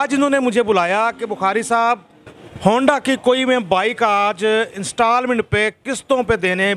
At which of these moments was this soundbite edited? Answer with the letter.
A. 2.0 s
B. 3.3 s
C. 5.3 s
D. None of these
A